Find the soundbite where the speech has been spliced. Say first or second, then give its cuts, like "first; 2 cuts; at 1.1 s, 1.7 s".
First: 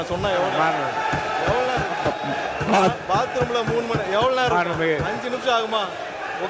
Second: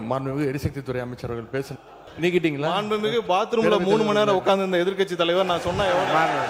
second; 1 cut; at 2.1 s